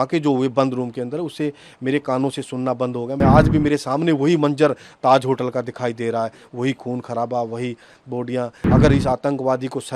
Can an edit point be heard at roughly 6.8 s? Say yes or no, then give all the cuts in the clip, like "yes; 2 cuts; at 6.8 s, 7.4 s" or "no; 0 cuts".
no; 2 cuts; at 3.2 s, 8.6 s